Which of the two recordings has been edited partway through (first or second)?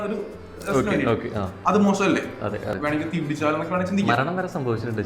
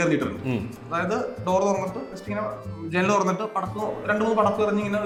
first